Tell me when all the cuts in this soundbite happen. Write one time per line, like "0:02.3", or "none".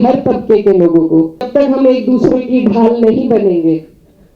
0:01.5

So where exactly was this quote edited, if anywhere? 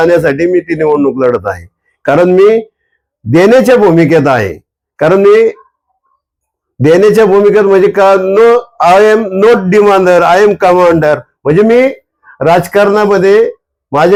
none

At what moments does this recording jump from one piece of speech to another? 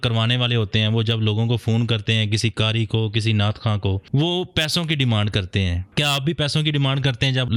none

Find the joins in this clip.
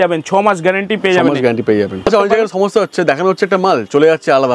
0:02.1

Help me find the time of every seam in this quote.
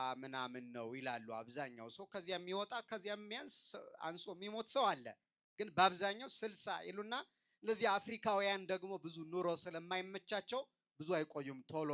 none

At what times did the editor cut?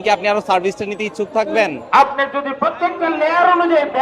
0:01.8

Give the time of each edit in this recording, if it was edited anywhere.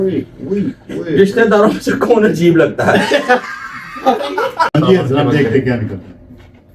0:04.8

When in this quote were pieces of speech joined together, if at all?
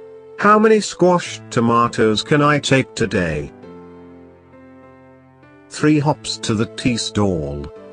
0:03.7

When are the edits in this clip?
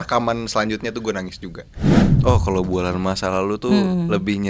0:02.1

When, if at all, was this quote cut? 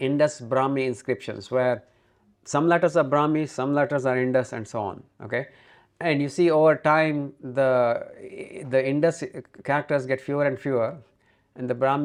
none

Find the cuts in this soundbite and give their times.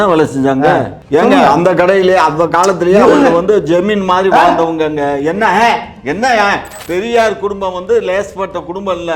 0:01.0
0:06.7

